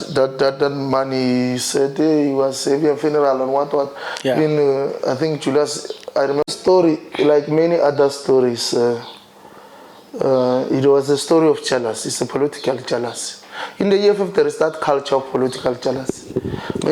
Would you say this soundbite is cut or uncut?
cut